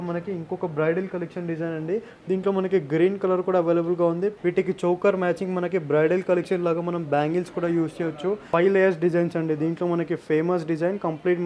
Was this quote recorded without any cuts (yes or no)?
no